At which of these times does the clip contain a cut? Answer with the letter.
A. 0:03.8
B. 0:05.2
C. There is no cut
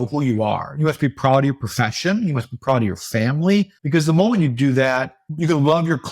A